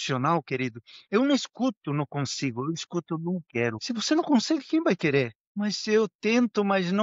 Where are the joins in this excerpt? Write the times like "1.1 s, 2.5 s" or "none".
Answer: 3.8 s, 5.4 s